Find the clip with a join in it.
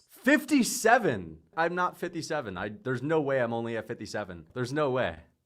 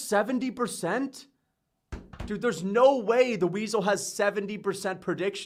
first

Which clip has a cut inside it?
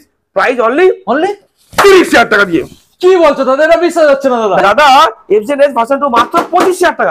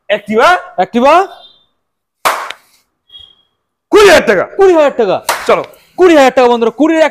first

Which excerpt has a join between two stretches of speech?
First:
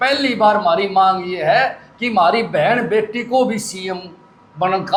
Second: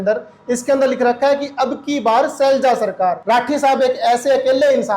second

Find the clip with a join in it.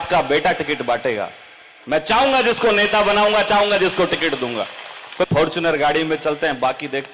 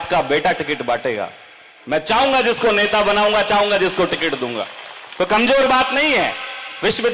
first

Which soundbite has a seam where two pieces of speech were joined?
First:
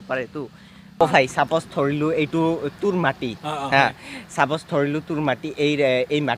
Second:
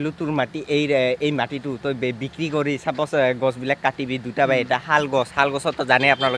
first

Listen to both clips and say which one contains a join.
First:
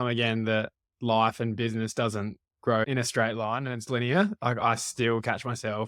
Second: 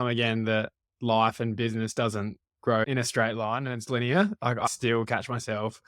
second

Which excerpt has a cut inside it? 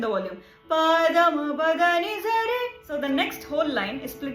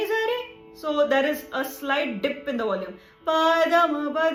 first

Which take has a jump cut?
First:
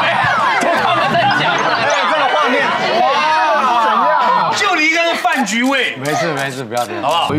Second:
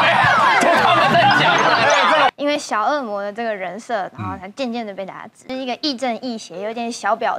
second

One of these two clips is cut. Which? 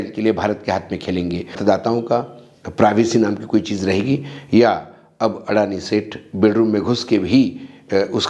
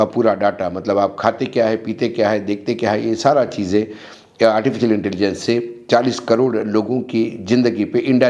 first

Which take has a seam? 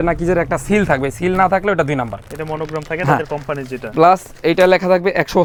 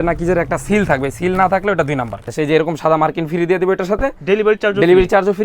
second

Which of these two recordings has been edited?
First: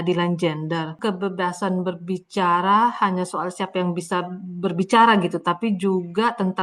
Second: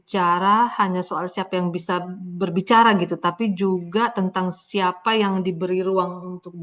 first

